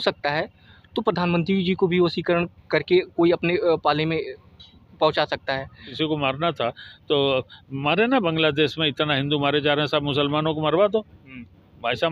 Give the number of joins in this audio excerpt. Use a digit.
1